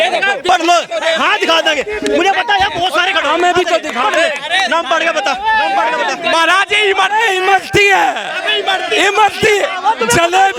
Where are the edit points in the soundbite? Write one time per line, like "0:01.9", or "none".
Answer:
none